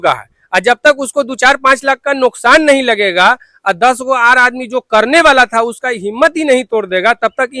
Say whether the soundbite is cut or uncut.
uncut